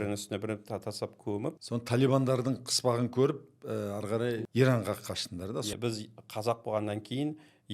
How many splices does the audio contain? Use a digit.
3